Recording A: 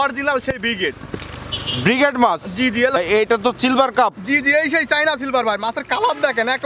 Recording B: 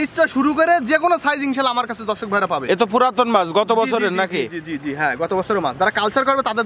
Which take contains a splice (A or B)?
A